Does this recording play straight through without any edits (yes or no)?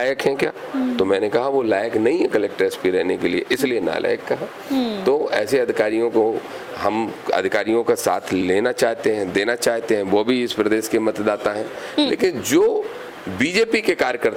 yes